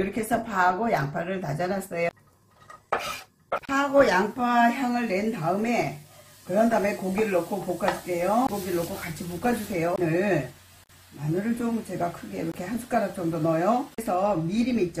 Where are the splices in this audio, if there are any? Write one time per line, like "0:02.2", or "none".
0:02.1
0:08.5
0:10.0
0:14.0